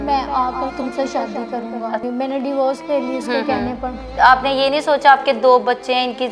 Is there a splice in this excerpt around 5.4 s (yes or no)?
no